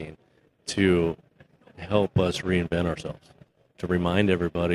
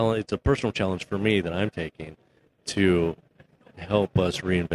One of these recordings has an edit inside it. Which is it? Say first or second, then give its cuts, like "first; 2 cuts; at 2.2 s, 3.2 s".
first; 1 cut; at 3.7 s